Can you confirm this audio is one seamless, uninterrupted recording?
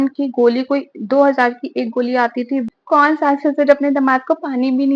no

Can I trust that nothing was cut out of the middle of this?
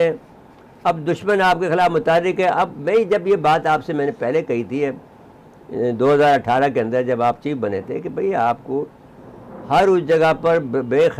yes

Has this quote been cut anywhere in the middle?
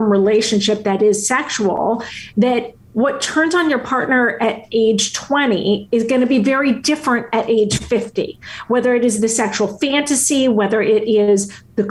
no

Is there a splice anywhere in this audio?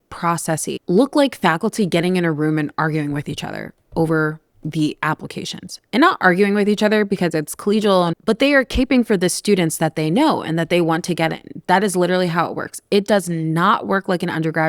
no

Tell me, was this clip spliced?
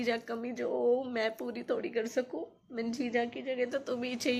no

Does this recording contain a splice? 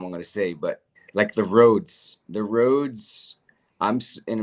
yes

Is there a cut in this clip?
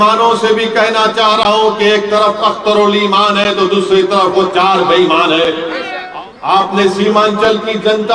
yes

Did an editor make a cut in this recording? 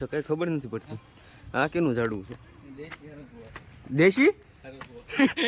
no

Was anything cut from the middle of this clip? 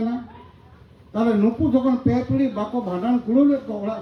no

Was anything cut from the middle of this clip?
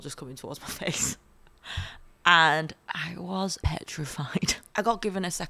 yes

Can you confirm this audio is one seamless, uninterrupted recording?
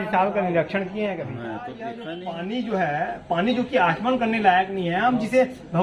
no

